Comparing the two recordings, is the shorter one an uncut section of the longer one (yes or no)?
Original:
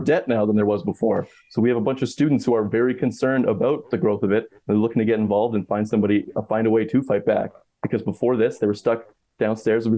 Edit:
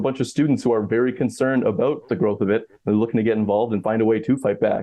no